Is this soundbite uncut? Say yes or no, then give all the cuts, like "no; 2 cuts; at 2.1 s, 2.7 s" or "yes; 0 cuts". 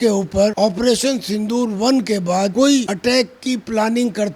yes; 0 cuts